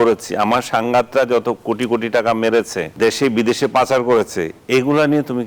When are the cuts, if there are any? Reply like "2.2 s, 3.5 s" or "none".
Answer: 2.9 s